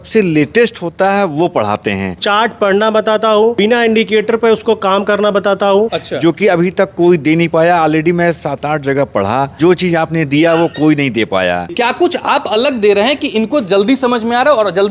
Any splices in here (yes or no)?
yes